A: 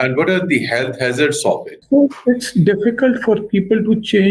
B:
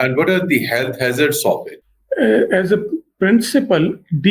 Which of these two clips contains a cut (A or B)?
B